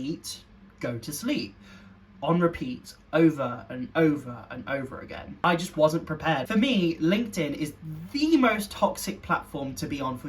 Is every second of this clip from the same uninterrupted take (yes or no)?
no